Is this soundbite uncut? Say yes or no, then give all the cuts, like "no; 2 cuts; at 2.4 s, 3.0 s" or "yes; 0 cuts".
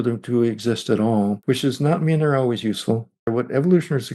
no; 2 cuts; at 1.4 s, 3.3 s